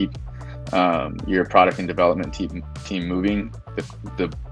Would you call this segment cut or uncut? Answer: uncut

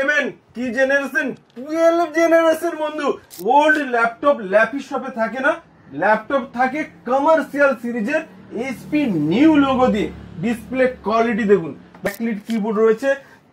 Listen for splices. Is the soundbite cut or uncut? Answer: cut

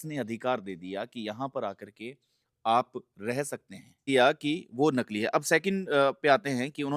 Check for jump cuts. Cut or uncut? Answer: cut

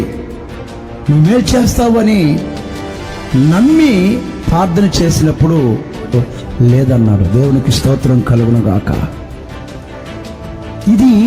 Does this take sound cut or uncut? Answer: cut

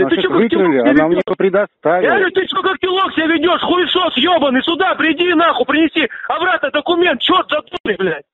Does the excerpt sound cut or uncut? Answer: uncut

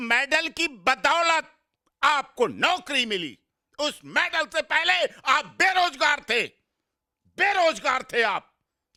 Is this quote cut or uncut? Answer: uncut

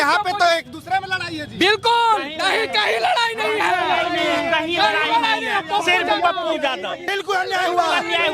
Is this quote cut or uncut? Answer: cut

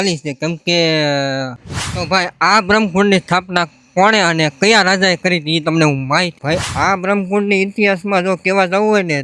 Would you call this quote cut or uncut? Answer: cut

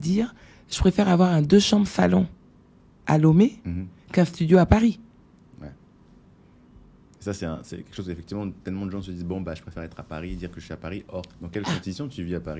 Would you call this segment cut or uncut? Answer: uncut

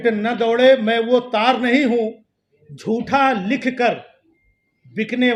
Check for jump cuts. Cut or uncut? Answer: uncut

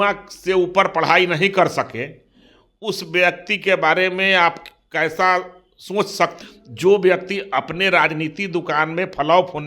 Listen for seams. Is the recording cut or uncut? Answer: cut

